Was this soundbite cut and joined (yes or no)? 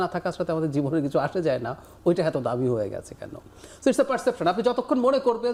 no